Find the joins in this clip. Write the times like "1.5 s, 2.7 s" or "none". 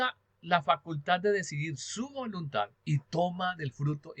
2.8 s